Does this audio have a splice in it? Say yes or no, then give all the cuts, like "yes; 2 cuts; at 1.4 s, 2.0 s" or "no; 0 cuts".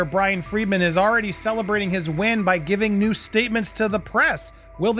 no; 0 cuts